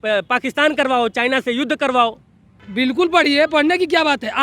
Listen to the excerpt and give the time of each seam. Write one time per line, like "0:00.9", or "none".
0:02.6